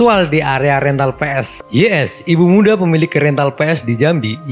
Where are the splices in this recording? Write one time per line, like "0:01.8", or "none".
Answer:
0:01.5